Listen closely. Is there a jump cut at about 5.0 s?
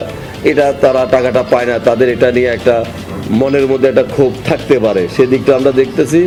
no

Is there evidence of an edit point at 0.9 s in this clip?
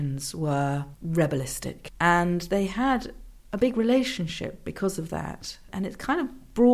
yes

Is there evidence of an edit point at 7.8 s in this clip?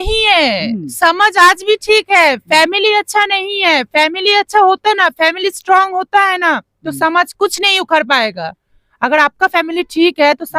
no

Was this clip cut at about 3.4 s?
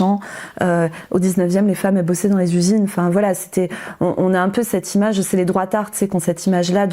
no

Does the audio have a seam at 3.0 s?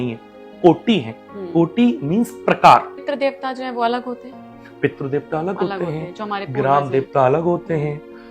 yes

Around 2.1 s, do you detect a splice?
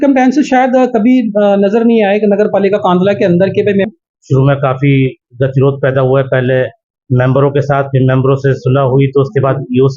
no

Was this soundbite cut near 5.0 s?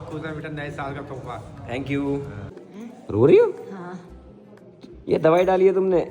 no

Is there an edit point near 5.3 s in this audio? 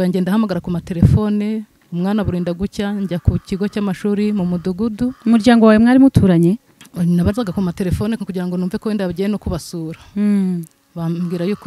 no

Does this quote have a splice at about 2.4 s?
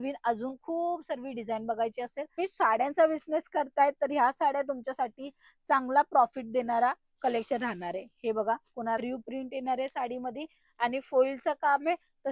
yes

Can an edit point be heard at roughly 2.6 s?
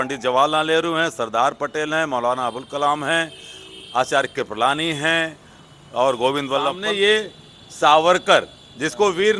no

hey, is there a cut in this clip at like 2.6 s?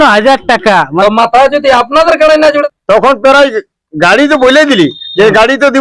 yes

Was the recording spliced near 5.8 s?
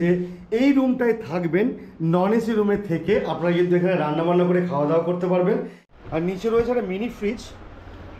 yes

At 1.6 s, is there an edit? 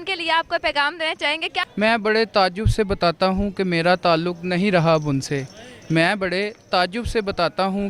yes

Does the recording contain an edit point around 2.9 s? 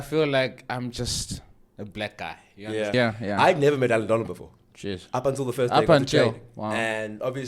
yes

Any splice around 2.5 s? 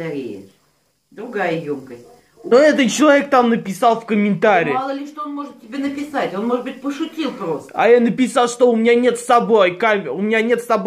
yes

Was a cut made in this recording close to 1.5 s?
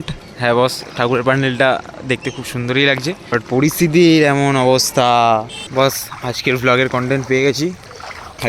no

